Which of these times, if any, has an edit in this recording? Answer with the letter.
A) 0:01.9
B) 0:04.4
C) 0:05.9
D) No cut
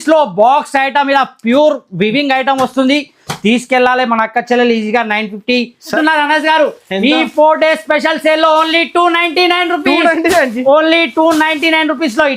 C